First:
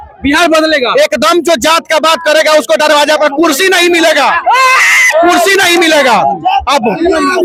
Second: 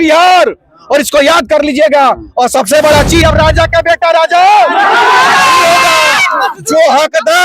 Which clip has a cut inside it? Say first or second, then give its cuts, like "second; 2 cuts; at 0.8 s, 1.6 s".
second; 1 cut; at 3.2 s